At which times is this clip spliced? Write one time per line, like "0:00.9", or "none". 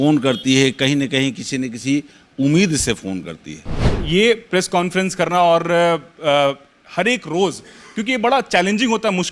0:03.9

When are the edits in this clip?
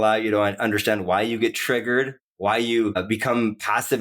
0:02.2
0:03.0

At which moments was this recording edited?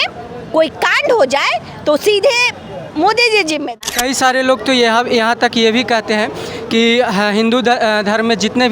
0:03.8

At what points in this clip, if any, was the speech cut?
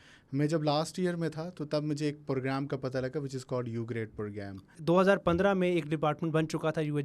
0:04.8

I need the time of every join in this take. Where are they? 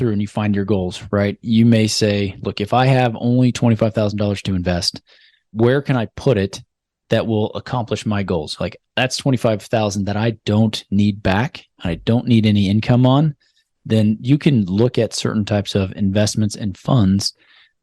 none

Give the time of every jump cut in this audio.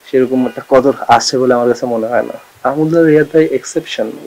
0:02.4

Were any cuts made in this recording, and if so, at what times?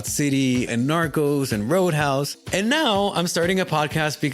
0:02.4

